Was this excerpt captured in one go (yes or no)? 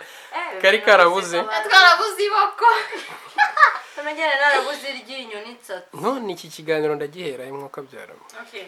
yes